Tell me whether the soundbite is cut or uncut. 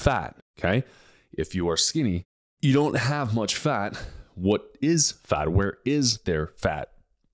uncut